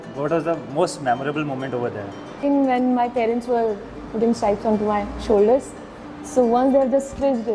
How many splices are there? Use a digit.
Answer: 1